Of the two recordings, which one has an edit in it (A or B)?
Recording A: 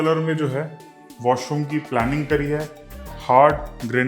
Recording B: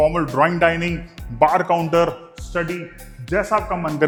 A